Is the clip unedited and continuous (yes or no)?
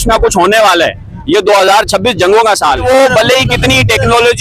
no